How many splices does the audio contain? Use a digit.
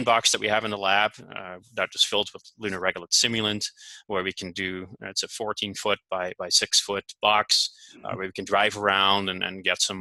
0